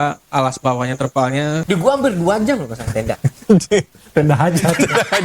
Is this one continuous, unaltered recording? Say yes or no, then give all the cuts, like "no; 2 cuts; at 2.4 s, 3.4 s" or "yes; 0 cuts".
no; 1 cut; at 1.6 s